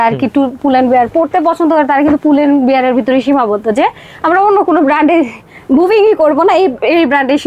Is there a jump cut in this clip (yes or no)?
no